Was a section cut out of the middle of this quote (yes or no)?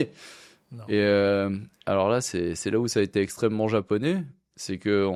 no